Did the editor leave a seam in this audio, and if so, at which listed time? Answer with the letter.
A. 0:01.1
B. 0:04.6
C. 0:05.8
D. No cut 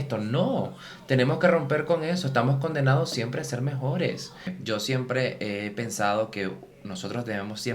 B